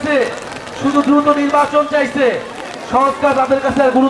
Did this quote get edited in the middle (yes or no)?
no